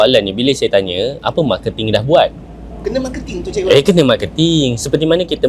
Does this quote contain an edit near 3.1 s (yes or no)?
no